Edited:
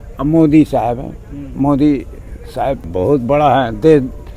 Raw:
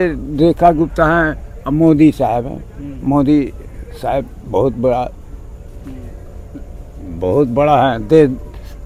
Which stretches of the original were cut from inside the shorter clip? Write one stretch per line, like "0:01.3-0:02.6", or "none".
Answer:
0:04.3-0:07.1